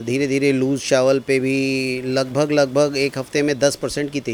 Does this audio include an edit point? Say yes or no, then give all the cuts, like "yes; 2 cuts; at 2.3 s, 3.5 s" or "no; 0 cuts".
no; 0 cuts